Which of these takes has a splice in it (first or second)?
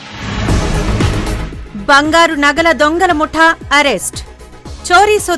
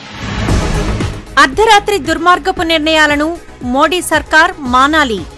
second